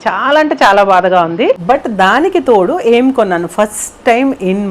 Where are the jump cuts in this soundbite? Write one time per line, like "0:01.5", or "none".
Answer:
0:01.6